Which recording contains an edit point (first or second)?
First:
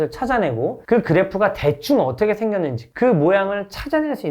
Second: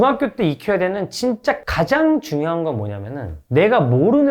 first